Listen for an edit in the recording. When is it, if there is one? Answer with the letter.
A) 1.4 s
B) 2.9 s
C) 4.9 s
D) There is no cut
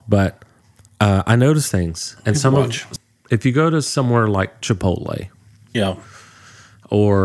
B